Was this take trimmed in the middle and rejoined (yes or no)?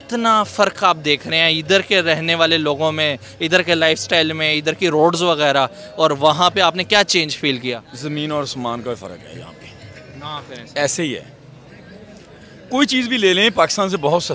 no